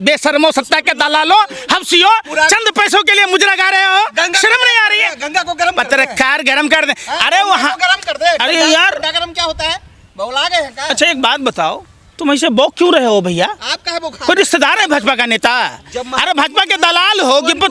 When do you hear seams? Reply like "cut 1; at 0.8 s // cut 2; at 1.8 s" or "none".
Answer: none